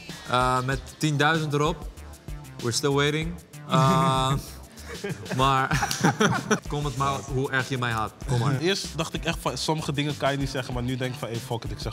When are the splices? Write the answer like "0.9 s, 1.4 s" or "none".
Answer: 6.6 s, 8.6 s